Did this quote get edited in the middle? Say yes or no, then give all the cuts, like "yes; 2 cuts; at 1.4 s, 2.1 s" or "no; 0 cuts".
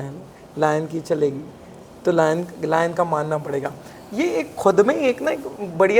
no; 0 cuts